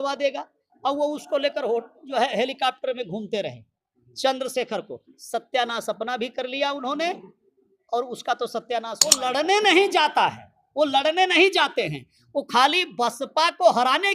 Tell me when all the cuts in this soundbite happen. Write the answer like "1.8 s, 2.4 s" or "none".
9.2 s